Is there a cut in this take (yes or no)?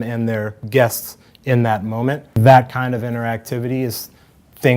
yes